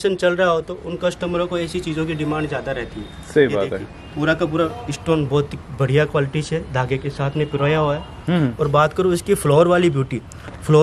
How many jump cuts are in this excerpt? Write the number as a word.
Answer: zero